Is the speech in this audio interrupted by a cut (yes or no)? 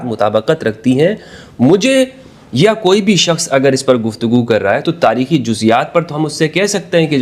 no